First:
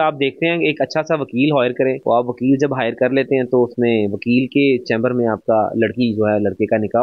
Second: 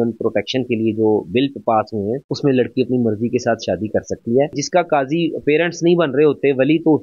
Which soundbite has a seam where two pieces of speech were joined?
second; 1 cut; at 4.5 s

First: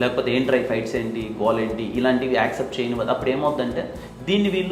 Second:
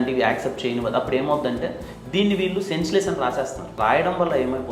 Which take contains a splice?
second; 1 cut; at 3.7 s

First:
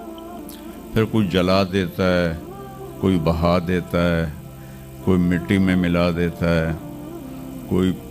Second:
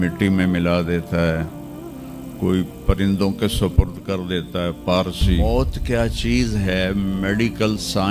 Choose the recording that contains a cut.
second; 1 cut; at 5.4 s

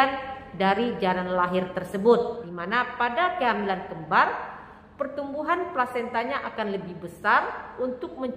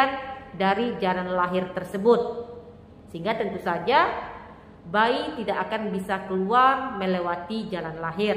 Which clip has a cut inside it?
first; 1 cut; at 2.5 s

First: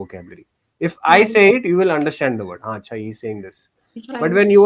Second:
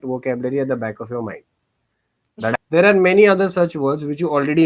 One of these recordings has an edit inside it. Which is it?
second; 1 cut; at 2.5 s

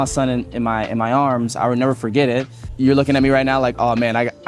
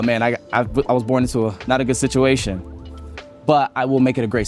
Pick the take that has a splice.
first; 1 cut; at 2.6 s

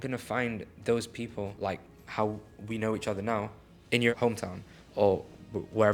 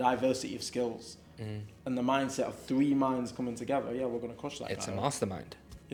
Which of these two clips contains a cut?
first; 2 cuts; at 1.5 s, 4.2 s

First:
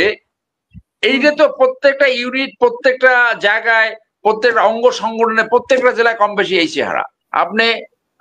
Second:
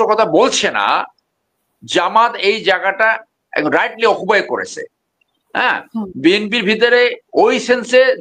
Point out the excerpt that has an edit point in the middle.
first; 1 cut; at 7.2 s

